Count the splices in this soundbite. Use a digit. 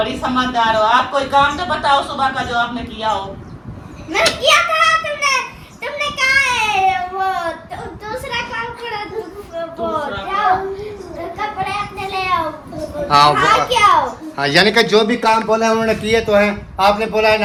0